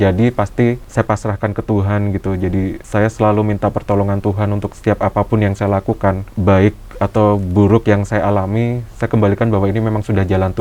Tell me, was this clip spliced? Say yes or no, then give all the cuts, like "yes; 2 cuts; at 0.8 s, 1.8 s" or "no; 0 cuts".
yes; 4 cuts; at 0.8 s, 2.8 s, 4.7 s, 6.3 s